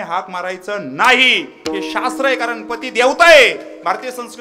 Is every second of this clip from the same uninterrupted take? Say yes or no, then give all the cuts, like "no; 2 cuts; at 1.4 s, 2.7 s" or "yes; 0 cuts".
yes; 0 cuts